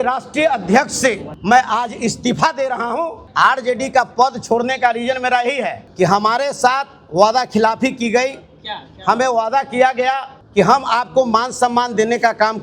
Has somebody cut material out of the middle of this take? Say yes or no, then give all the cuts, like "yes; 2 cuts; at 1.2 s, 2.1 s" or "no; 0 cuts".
yes; 4 cuts; at 1.3 s, 3.2 s, 5.8 s, 10.3 s